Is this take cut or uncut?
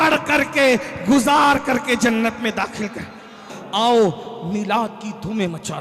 cut